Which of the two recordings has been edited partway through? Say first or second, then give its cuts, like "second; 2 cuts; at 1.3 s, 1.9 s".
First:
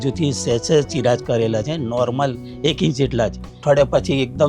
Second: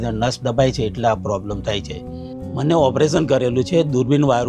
first; 1 cut; at 3.6 s